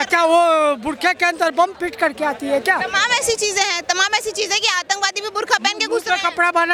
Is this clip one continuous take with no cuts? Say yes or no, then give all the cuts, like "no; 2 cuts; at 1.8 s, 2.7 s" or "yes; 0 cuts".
yes; 0 cuts